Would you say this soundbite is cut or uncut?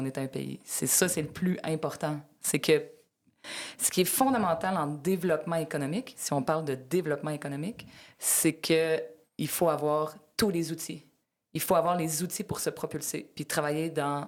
uncut